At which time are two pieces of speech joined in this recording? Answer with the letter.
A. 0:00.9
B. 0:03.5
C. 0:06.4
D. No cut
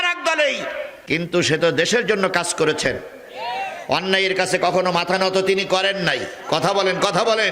A